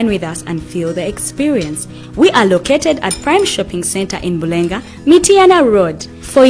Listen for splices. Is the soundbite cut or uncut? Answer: uncut